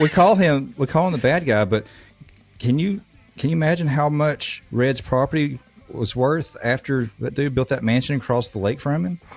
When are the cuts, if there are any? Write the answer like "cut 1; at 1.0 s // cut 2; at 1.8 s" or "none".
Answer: none